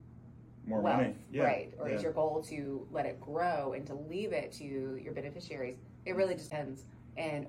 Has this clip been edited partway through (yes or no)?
yes